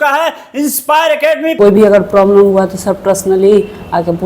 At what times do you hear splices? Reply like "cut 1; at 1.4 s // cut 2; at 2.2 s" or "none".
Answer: cut 1; at 1.5 s